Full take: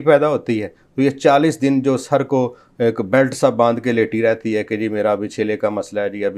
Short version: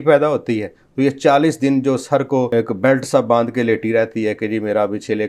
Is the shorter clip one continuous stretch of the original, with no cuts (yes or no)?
no